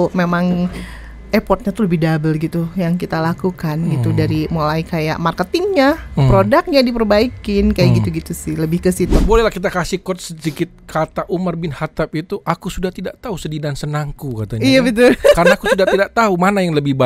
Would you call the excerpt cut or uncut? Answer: cut